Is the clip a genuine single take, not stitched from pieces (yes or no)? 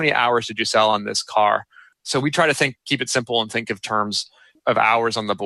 no